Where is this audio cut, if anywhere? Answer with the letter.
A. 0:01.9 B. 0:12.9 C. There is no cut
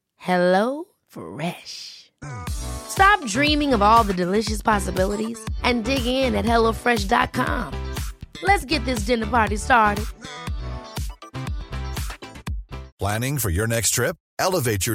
B